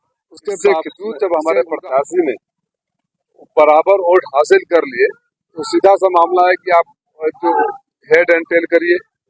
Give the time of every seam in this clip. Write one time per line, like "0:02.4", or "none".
0:01.0